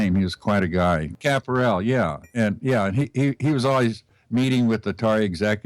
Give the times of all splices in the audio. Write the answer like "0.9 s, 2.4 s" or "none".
1.2 s